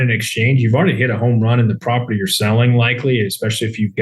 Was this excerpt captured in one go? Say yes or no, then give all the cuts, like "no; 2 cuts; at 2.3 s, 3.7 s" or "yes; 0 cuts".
yes; 0 cuts